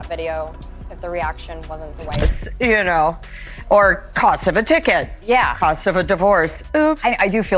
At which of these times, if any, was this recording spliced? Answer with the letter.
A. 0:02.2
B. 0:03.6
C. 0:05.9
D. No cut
A